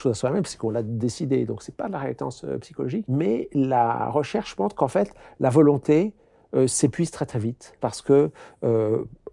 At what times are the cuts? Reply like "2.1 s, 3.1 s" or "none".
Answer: 3.1 s, 7.8 s